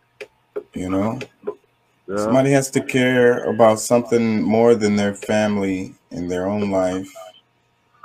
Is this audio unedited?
yes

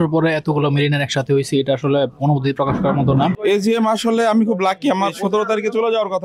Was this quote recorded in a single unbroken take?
no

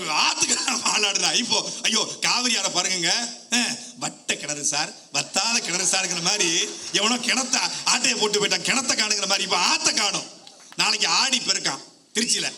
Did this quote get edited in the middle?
no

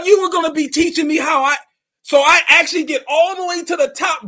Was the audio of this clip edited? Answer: no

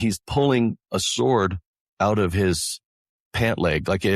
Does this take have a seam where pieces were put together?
no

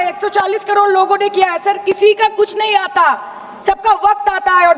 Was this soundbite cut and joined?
no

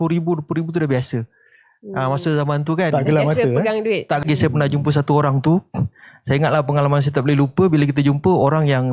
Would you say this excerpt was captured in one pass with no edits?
no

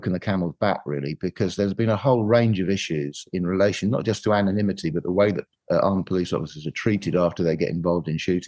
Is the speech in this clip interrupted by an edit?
no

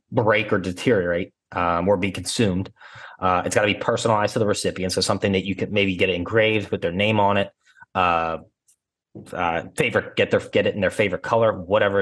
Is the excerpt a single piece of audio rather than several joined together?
yes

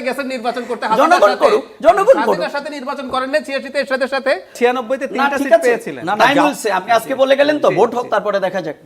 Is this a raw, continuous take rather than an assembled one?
no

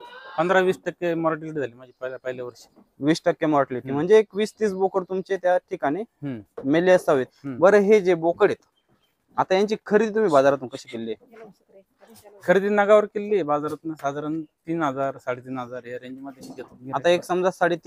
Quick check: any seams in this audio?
yes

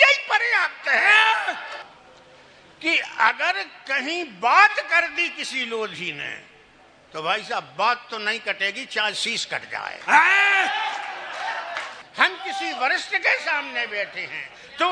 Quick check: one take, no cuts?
no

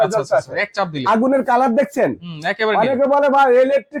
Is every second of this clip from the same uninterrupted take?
yes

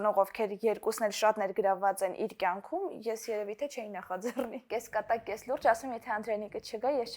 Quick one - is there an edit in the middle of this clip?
yes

